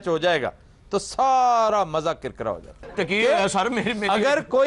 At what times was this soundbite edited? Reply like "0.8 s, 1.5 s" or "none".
2.8 s